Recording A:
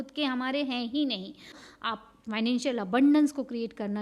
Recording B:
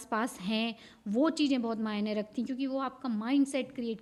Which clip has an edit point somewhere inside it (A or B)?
A